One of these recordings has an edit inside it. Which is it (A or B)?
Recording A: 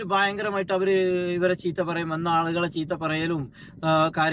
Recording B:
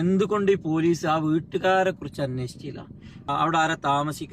B